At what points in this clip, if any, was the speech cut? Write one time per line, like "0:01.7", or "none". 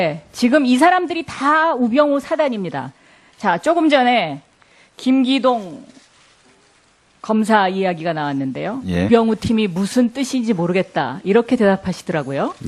none